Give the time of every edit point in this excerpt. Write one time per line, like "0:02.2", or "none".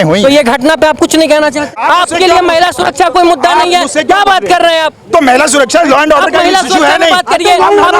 0:01.7